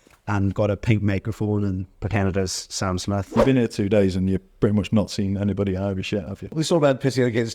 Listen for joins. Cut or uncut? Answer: cut